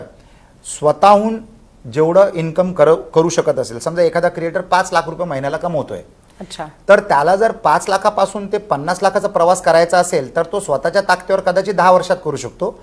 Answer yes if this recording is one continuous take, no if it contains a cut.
yes